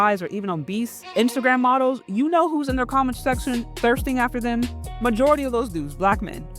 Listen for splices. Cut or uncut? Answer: cut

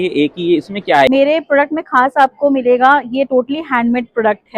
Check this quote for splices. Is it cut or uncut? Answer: cut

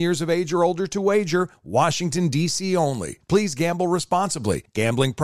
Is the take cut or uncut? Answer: uncut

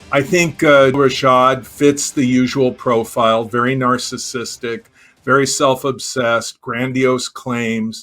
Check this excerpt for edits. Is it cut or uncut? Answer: cut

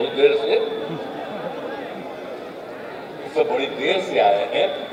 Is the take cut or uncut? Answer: uncut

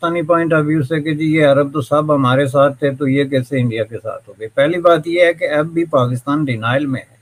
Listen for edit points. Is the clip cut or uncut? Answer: uncut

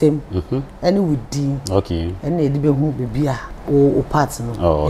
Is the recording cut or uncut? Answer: cut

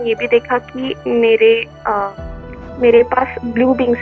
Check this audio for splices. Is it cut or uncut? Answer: uncut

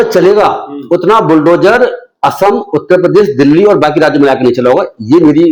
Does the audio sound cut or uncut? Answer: uncut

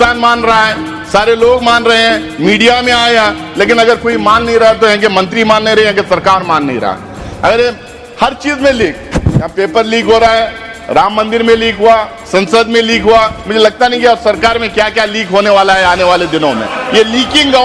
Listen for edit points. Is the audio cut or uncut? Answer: uncut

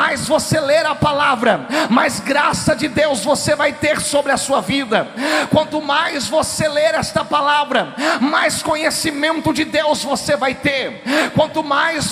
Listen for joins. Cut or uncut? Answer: uncut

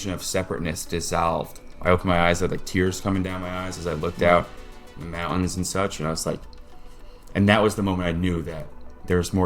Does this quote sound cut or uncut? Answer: cut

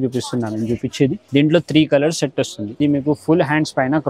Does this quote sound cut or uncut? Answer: cut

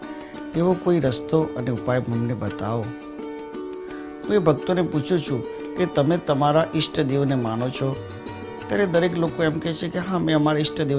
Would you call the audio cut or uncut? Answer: uncut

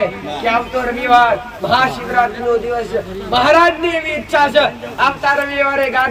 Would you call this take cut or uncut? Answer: uncut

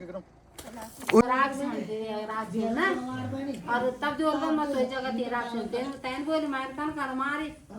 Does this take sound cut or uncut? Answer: cut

